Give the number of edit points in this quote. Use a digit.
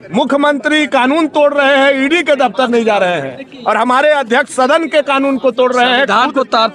0